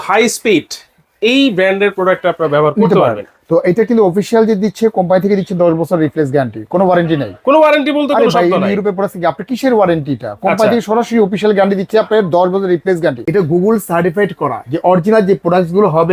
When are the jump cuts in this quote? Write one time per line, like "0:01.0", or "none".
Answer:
0:13.2

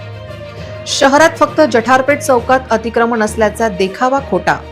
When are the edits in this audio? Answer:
0:01.0

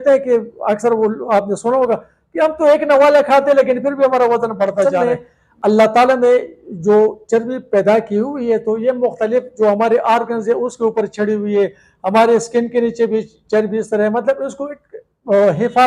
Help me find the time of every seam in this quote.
0:04.9

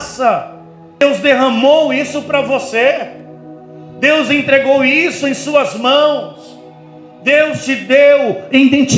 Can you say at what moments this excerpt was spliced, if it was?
0:01.0

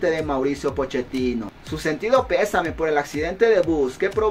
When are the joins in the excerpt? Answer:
0:01.5

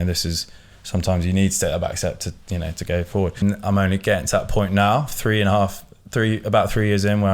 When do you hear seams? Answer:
0:03.4

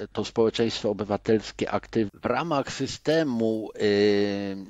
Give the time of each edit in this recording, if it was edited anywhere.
0:02.1

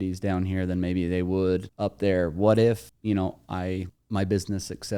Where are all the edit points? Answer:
0:01.7
0:02.9
0:04.0

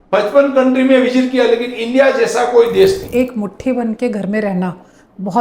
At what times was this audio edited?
0:03.1

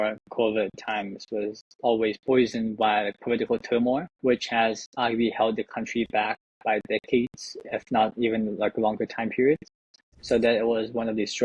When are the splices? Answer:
none

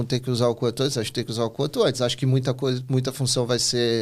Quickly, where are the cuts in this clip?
none

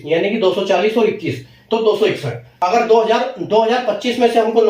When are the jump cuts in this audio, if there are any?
0:02.4

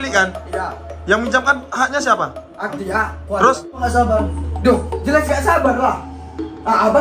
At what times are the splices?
0:03.8

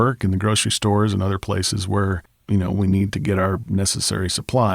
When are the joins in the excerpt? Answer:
0:02.3

